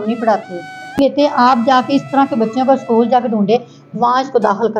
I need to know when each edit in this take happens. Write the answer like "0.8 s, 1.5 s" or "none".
1.0 s